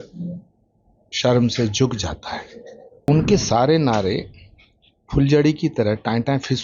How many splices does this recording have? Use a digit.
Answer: 1